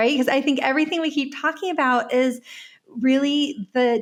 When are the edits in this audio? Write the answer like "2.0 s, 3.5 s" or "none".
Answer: none